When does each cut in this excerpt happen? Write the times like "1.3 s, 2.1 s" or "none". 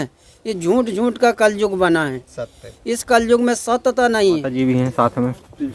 4.5 s